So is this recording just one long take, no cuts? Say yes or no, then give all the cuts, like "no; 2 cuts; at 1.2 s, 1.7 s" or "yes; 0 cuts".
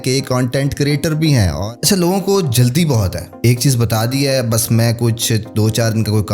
no; 2 cuts; at 1.6 s, 3.2 s